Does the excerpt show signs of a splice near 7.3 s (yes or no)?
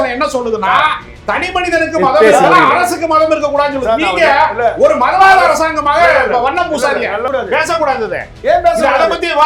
yes